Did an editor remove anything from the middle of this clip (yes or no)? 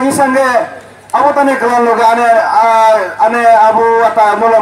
no